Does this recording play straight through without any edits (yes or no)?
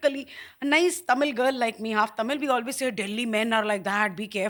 yes